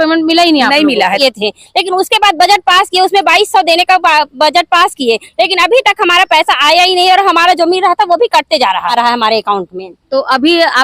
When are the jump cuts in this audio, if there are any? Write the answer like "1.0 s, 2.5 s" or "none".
1.2 s, 8.9 s